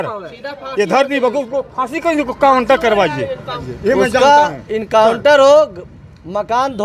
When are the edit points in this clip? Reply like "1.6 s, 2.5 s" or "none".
3.6 s